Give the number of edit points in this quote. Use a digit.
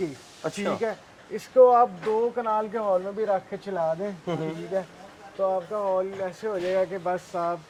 0